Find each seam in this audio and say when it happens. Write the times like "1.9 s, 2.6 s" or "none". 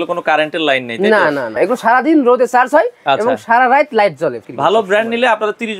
1.5 s, 4.4 s